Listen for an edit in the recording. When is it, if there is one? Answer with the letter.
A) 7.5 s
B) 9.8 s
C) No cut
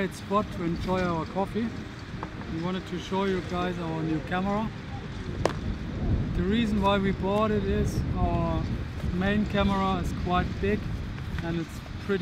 B